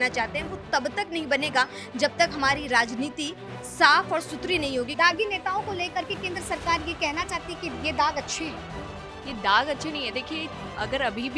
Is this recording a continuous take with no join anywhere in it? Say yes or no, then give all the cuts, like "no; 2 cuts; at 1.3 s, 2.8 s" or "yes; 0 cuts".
no; 1 cut; at 4.9 s